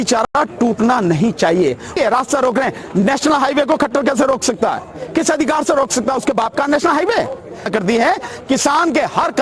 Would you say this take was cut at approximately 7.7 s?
yes; 2 cuts; at 2.0 s, 7.7 s

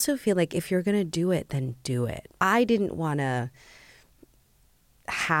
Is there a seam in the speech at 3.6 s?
no; 1 cut; at 2.2 s

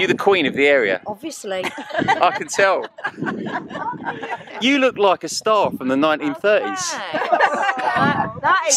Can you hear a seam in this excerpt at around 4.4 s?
yes; 1 cut; at 4.4 s

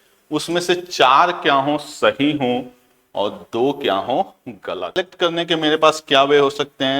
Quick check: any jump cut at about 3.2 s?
no; 1 cut; at 5.0 s

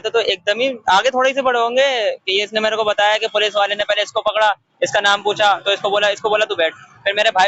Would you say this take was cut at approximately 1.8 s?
no; 0 cuts

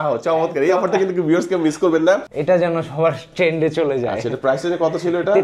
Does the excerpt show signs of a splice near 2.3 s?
yes; 1 cut; at 2.3 s

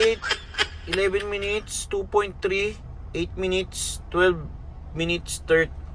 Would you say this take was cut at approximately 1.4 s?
no; 0 cuts

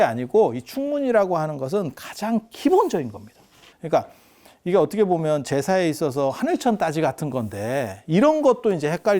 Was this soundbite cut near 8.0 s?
no; 1 cut; at 3.6 s

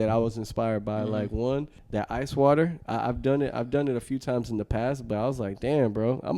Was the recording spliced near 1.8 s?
yes; 1 cut; at 1.8 s

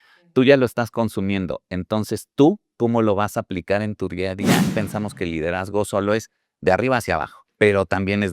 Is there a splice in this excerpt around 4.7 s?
yes; 2 cuts; at 4.7 s, 7.4 s

